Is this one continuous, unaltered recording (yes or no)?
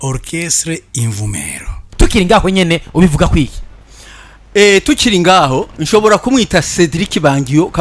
yes